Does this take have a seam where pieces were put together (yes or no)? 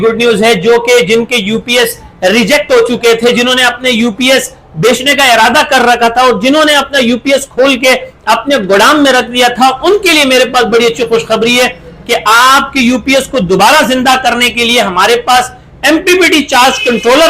no